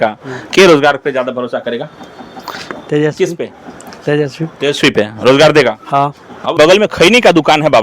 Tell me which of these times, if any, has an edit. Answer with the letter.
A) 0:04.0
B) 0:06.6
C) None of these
B